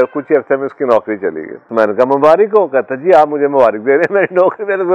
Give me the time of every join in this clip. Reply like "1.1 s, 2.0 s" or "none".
1.7 s